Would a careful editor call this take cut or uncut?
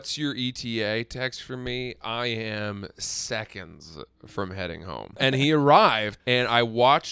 cut